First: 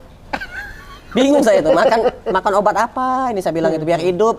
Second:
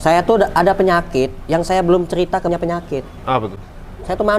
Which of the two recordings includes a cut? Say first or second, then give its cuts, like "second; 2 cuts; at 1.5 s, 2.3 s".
second; 1 cut; at 2.5 s